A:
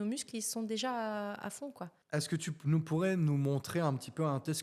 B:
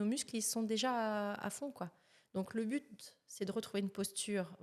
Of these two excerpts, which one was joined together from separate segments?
A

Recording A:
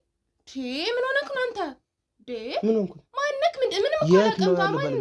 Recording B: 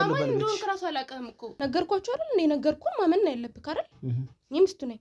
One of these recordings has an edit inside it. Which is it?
B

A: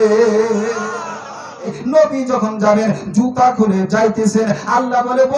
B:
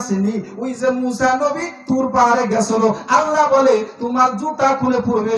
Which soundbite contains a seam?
A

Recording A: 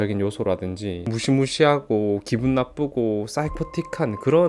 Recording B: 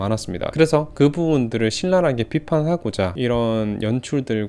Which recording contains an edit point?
B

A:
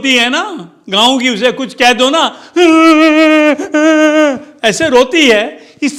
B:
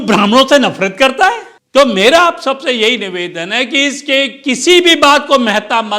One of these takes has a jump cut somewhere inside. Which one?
B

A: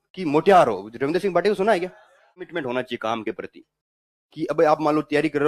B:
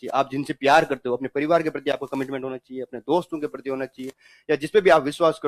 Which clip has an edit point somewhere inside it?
A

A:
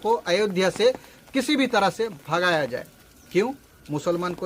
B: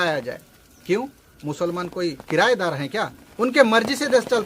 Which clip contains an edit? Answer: B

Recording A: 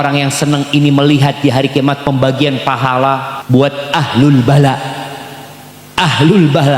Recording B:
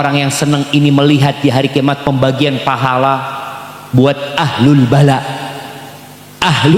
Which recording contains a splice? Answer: A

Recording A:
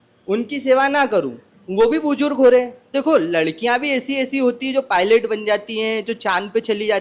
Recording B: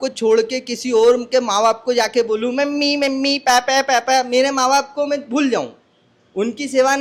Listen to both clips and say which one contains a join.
A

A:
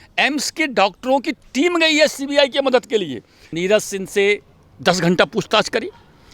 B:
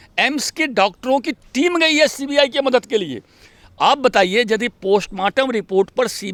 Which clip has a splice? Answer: A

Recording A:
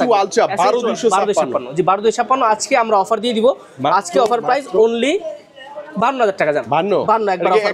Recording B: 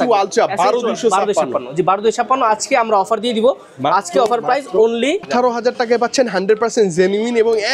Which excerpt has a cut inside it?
B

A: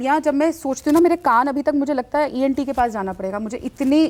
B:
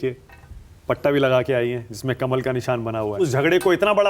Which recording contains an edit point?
B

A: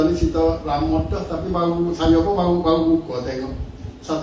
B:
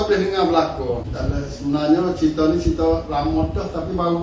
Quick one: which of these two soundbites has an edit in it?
B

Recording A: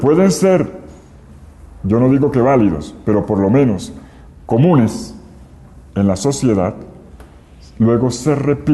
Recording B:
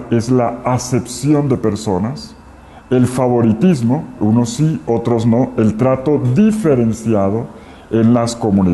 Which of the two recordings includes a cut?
B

